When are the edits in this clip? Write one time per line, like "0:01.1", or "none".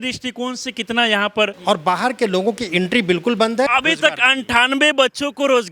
0:01.6
0:03.7